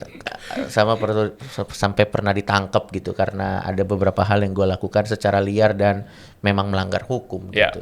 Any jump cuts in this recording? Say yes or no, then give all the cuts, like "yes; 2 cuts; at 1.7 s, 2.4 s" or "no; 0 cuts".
no; 0 cuts